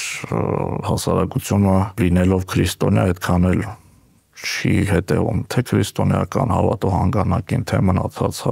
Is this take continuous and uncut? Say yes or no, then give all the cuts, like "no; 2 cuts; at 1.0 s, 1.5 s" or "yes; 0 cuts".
no; 1 cut; at 2.0 s